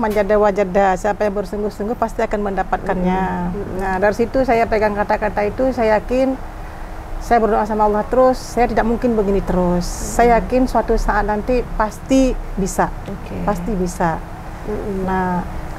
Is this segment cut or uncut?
uncut